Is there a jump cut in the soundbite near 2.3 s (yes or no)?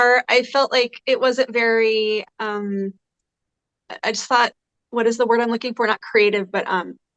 no